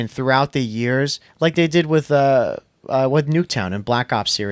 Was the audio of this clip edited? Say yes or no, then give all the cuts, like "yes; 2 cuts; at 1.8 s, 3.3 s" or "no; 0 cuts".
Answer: no; 0 cuts